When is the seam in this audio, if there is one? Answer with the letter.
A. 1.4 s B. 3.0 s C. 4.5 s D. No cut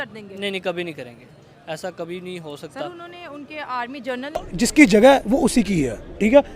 C